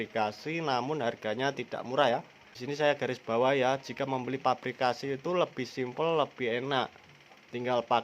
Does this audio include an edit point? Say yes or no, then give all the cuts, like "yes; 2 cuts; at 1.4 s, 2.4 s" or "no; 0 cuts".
yes; 1 cut; at 2.5 s